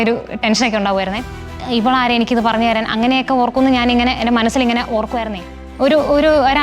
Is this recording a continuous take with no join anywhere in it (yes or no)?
no